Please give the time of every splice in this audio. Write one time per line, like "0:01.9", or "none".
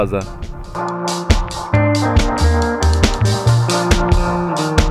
none